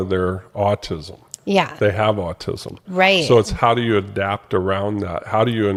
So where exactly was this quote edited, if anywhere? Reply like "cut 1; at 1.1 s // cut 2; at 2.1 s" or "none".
none